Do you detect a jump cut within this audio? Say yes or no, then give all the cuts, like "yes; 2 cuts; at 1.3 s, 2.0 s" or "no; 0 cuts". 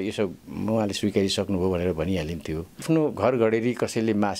yes; 1 cut; at 2.8 s